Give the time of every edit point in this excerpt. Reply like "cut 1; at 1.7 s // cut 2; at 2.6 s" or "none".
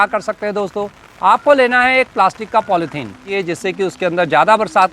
cut 1; at 3.3 s